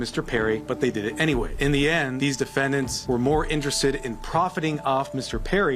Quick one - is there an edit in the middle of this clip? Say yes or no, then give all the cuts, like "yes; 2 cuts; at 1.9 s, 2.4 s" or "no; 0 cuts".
no; 0 cuts